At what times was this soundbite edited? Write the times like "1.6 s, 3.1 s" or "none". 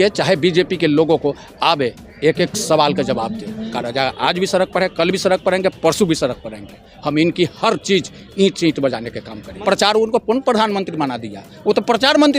3.7 s, 9.6 s